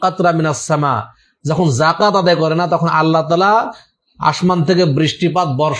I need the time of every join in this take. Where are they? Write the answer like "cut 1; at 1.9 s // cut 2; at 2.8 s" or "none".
none